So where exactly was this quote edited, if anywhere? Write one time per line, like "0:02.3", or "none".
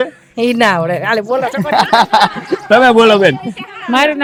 none